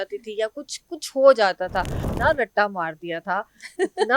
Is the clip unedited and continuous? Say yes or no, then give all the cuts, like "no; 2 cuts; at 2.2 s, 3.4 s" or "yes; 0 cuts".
no; 1 cut; at 2.0 s